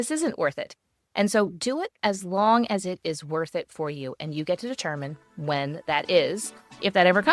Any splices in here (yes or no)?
no